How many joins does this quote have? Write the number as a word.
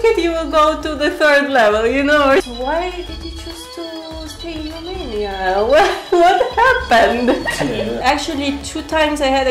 two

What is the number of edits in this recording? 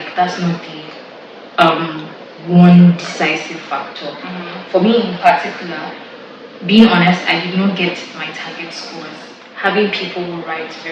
one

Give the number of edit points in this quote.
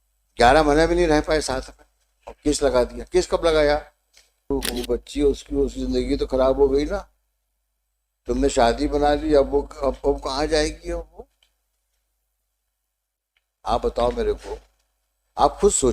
one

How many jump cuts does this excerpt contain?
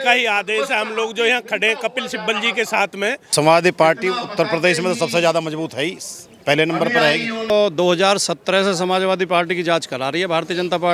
two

